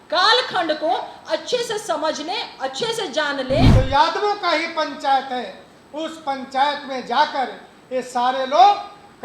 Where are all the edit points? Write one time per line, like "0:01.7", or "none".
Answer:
0:03.7